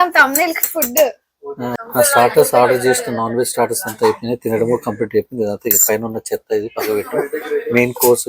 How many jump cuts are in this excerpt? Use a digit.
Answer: 1